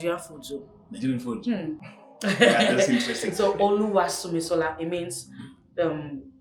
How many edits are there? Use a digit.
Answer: 1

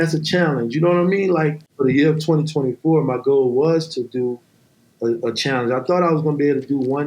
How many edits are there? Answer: 1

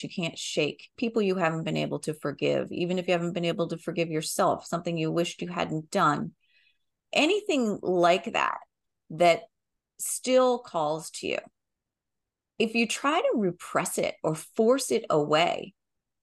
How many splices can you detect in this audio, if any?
1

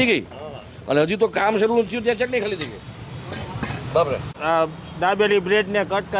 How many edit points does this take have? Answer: 1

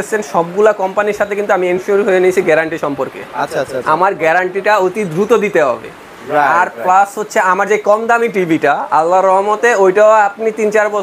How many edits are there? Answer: 0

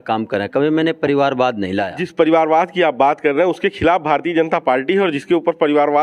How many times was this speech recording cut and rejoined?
1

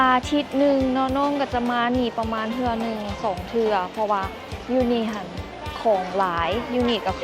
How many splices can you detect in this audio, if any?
0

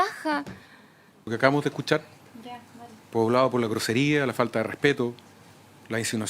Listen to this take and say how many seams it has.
1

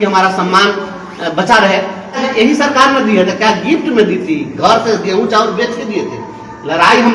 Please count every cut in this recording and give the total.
1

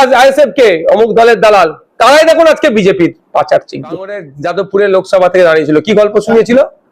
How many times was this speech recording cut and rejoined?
1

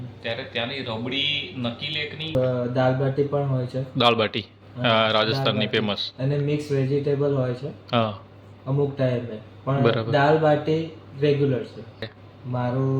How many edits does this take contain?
2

